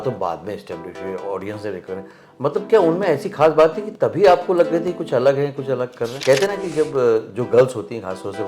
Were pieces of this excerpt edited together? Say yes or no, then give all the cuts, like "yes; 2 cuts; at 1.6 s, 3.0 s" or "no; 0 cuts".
yes; 1 cut; at 6.2 s